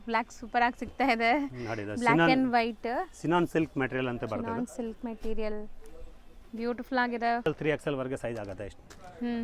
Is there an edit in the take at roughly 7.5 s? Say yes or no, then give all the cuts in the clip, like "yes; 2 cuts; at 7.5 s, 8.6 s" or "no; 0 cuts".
yes; 1 cut; at 7.5 s